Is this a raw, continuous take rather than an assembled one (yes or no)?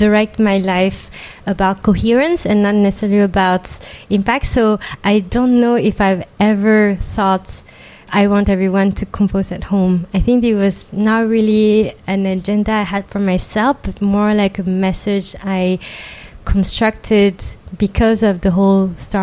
no